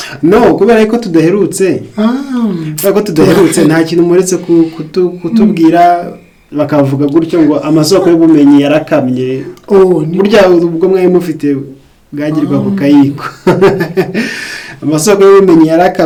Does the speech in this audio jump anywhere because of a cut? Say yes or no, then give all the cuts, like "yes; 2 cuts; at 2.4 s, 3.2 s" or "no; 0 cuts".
no; 0 cuts